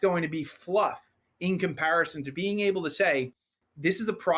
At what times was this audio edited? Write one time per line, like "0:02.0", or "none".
0:02.2